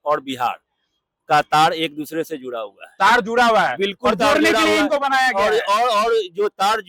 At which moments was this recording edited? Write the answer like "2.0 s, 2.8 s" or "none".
none